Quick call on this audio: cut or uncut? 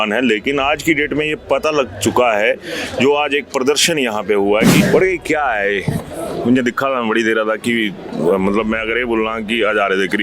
cut